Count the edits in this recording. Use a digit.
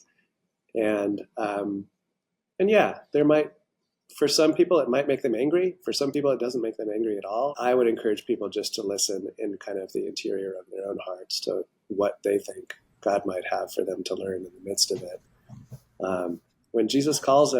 1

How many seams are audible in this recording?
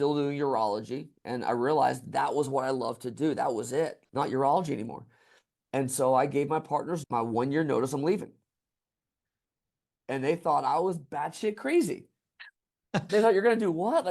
1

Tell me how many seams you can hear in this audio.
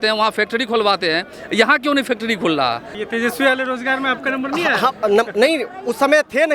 1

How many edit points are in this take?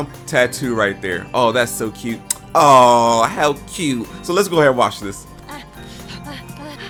0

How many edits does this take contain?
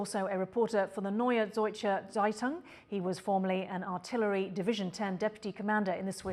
0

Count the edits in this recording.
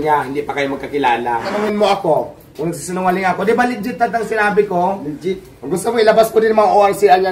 1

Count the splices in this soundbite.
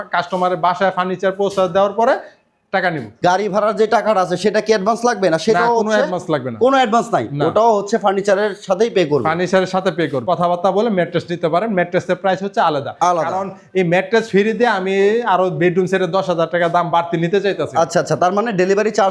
2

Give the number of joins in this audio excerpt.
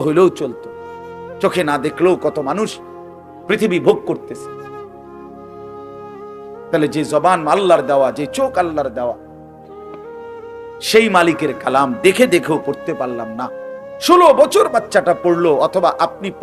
0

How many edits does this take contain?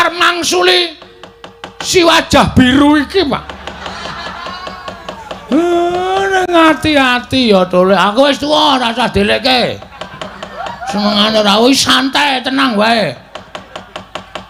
0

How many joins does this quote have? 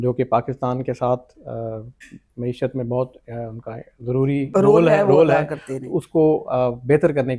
0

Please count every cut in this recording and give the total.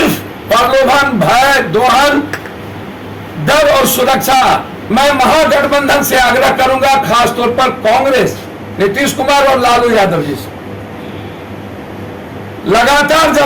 1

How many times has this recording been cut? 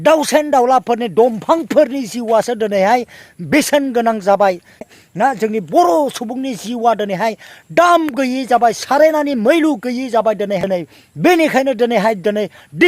2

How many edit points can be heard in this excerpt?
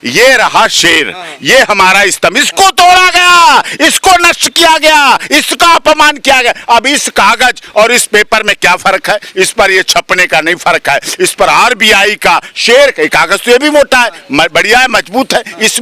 0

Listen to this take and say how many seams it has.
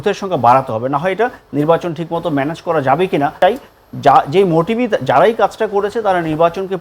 1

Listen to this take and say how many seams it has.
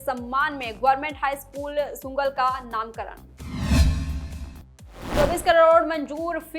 2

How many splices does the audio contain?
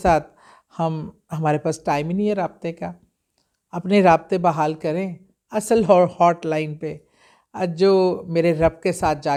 0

